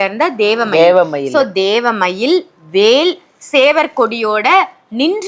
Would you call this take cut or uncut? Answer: uncut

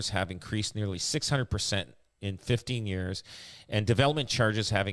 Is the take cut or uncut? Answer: uncut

